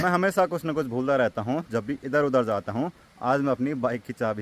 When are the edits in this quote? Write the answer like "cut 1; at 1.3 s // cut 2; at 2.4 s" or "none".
none